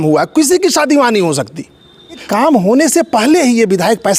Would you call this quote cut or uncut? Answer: cut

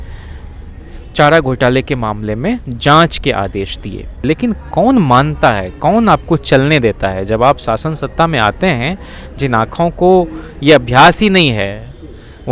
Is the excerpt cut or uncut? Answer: cut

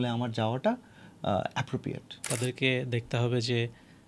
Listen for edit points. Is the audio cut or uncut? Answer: cut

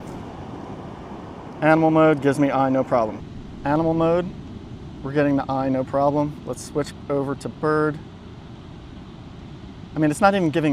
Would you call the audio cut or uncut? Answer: cut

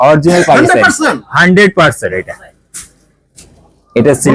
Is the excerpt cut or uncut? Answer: cut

